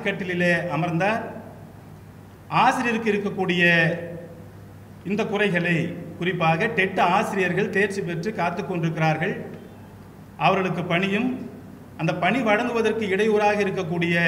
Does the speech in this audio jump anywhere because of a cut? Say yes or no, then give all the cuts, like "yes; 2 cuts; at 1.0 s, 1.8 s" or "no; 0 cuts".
no; 0 cuts